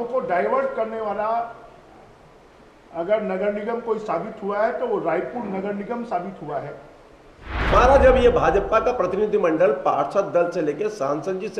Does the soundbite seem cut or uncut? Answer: cut